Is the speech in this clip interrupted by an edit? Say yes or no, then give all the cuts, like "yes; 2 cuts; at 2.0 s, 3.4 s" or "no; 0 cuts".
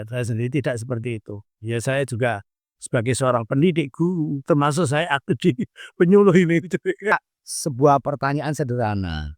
yes; 1 cut; at 7.1 s